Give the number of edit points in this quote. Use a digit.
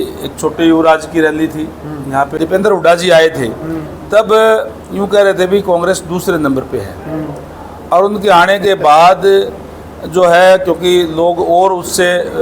1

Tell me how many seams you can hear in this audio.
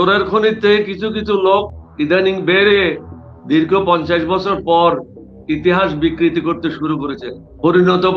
1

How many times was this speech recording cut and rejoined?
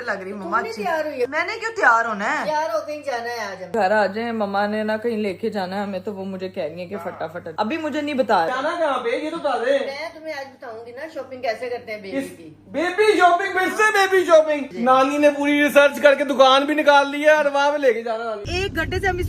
5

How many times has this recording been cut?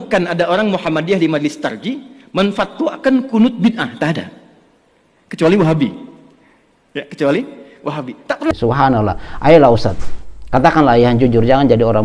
1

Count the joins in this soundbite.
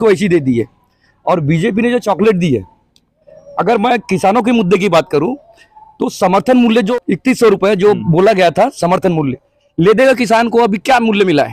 1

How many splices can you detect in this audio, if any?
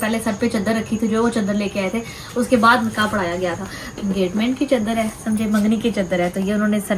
1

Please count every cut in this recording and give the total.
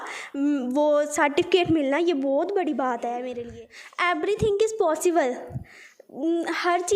1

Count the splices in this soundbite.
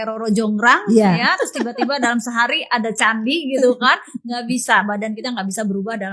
0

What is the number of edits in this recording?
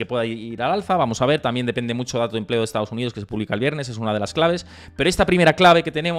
0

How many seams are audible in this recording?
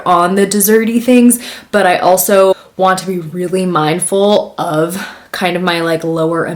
0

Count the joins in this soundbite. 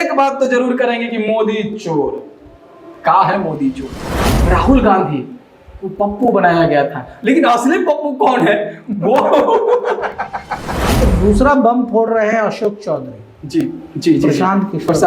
2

